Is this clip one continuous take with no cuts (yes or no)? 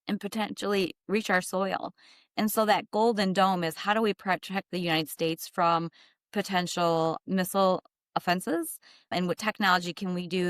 no